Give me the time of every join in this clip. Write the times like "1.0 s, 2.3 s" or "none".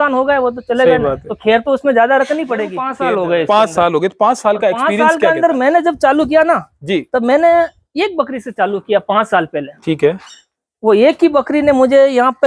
2.8 s